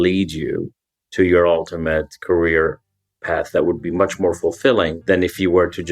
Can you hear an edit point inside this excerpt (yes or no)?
yes